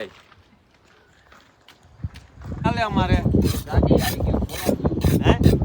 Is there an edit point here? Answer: yes; 1 cut; at 2.6 s

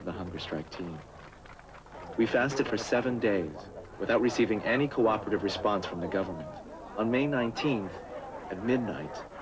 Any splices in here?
no; 0 cuts

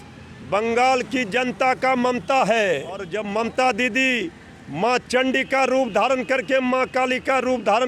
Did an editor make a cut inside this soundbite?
yes; 1 cut; at 3.1 s

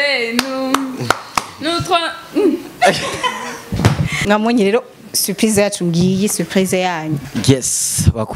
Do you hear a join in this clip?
yes; 2 cuts; at 4.2 s, 7.2 s

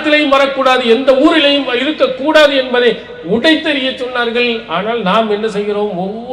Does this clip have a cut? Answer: no; 0 cuts

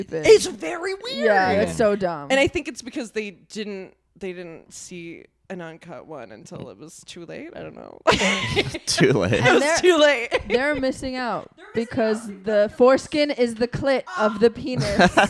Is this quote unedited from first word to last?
yes; 0 cuts

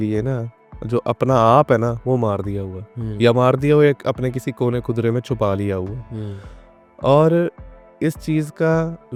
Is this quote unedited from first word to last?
yes; 0 cuts

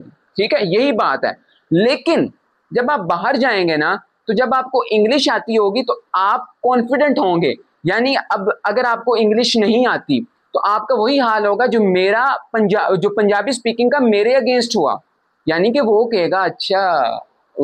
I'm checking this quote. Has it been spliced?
no; 0 cuts

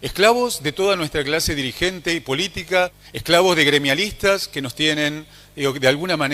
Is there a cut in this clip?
yes; 1 cut; at 3.0 s

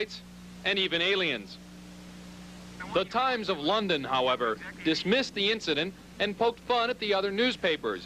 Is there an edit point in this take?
yes; 1 cut; at 1.8 s

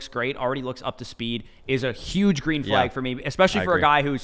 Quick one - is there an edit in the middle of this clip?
no; 0 cuts

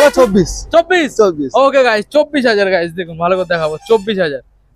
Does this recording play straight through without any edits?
yes; 0 cuts

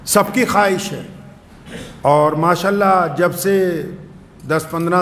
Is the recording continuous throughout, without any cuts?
yes; 0 cuts

